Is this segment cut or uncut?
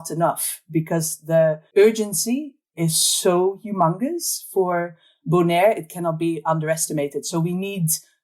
cut